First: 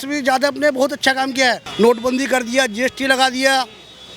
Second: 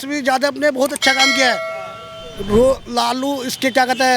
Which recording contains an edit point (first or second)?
first